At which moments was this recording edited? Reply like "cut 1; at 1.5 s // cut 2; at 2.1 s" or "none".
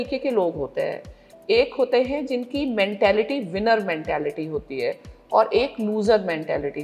none